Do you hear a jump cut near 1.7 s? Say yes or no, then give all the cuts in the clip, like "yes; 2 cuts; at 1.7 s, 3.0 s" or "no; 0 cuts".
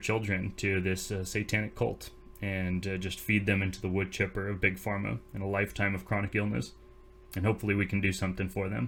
no; 0 cuts